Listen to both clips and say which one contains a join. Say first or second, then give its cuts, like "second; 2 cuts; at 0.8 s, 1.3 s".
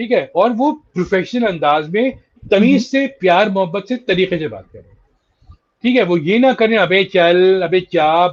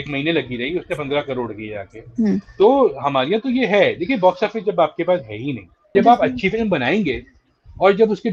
second; 1 cut; at 5.9 s